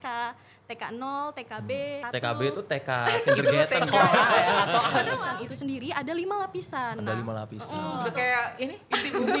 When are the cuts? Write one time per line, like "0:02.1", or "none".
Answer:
0:02.0
0:05.3
0:08.0